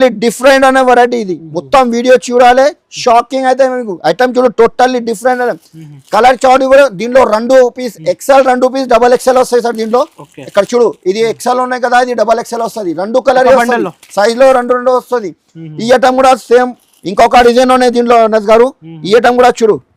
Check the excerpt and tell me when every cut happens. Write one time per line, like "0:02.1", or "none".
none